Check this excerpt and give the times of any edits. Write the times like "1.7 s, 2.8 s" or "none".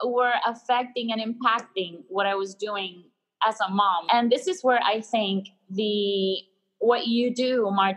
4.0 s

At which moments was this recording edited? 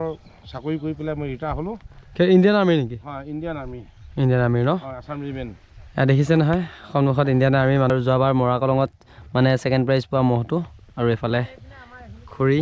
7.9 s

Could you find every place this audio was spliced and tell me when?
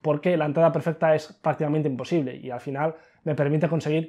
none

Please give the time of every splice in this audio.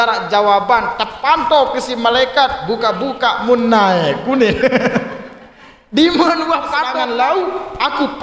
6.8 s

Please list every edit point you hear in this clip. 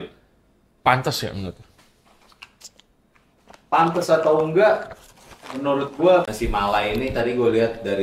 6.3 s

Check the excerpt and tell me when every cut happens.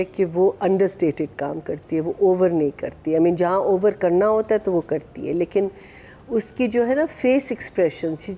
none

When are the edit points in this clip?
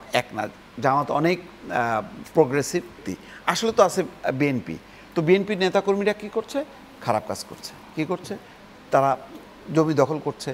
3.1 s

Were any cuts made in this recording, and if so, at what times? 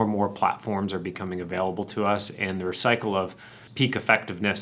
3.6 s

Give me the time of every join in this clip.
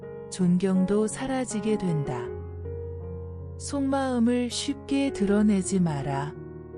2.2 s, 3.7 s

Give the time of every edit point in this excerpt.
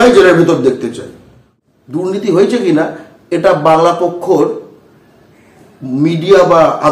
1.4 s

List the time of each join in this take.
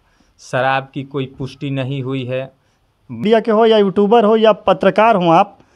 3.2 s

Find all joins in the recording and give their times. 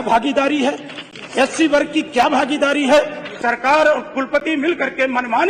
3.2 s

